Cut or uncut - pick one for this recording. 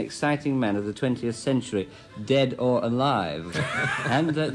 cut